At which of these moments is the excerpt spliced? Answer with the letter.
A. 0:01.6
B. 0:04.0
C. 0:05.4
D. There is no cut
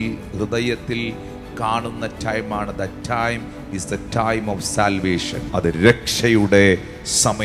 C